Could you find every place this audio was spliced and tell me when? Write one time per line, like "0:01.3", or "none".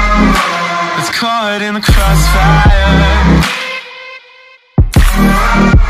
0:01.0